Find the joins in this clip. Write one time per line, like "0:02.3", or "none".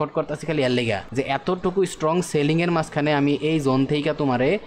0:01.0